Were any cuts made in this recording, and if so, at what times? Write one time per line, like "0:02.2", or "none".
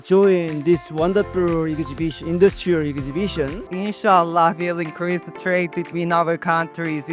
0:03.7